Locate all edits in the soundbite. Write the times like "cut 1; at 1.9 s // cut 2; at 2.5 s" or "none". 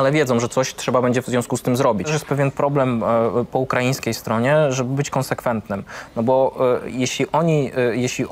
cut 1; at 2.1 s